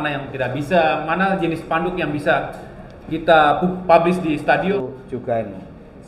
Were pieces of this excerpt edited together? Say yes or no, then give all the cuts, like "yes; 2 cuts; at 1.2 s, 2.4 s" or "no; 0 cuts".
yes; 1 cut; at 4.7 s